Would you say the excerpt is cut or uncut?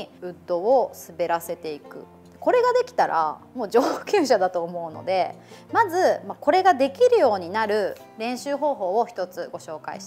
uncut